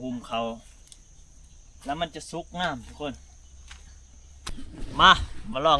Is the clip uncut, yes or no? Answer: no